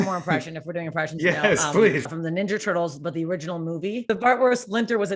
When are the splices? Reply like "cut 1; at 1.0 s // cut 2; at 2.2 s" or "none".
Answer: cut 1; at 2.1 s // cut 2; at 4.1 s